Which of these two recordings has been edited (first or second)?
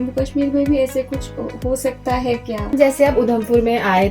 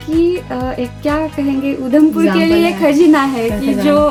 first